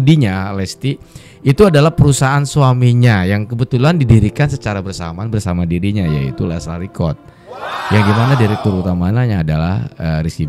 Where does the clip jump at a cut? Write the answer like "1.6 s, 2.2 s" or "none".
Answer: none